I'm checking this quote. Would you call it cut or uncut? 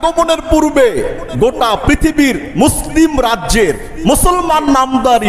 uncut